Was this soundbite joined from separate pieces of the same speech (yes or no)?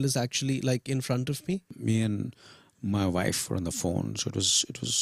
yes